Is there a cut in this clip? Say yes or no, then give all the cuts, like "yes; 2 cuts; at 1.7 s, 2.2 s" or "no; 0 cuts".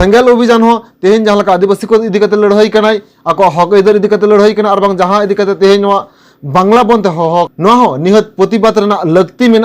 yes; 1 cut; at 7.5 s